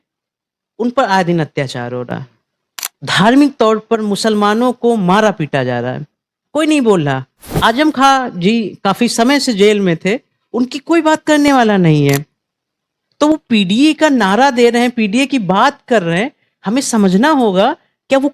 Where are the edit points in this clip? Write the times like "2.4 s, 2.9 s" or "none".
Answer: none

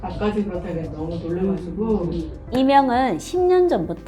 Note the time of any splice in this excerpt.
2.3 s

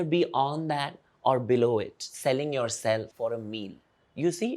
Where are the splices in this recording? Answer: 3.1 s

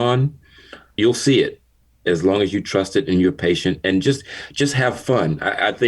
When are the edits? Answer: 1.0 s

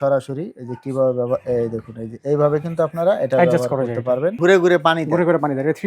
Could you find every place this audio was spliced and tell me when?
4.4 s

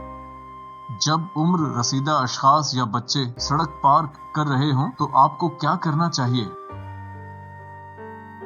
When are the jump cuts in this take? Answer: 1.0 s, 6.7 s

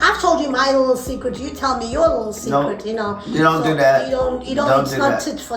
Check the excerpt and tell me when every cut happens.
none

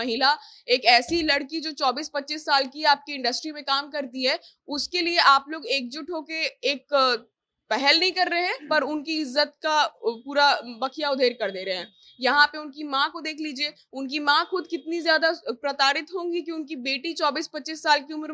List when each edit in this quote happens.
none

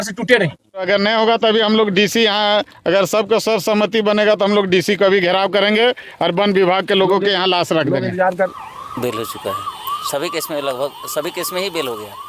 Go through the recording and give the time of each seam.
0.9 s, 8.5 s

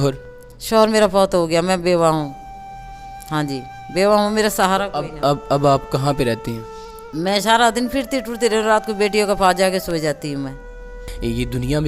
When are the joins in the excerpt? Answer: 11.0 s

